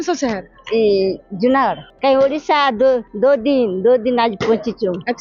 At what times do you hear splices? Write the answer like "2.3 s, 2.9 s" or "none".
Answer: 1.9 s